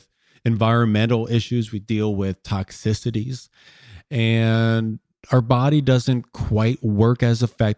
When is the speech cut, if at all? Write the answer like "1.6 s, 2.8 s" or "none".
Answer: none